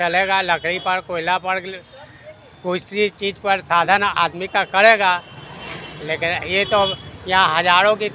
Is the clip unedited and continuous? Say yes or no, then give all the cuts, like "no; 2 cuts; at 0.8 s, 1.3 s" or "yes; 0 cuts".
yes; 0 cuts